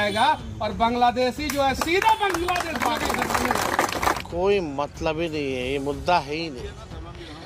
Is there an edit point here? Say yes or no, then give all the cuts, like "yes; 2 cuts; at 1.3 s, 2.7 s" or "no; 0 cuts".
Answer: yes; 1 cut; at 4.2 s